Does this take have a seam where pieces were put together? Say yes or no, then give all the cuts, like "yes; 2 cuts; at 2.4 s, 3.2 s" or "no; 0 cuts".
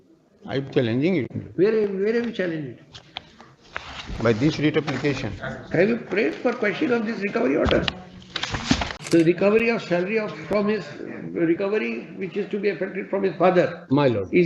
yes; 1 cut; at 8.9 s